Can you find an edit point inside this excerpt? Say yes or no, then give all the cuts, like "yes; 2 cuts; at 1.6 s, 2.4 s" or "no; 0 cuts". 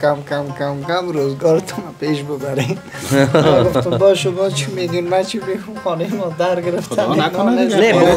no; 0 cuts